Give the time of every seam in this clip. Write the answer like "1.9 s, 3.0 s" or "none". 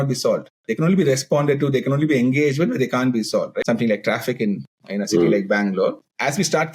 3.6 s